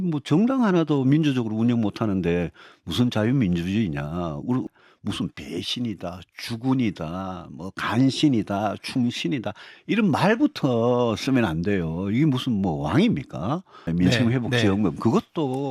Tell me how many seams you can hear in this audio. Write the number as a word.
two